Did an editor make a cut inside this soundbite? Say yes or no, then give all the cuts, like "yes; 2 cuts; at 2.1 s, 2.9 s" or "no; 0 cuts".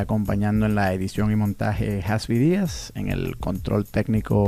no; 0 cuts